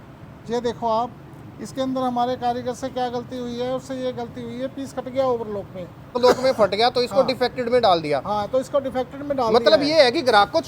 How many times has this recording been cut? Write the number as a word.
one